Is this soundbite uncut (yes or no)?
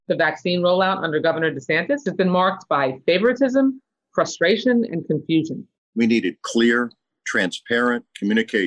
no